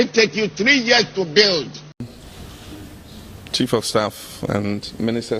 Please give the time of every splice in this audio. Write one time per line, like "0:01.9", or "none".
0:01.9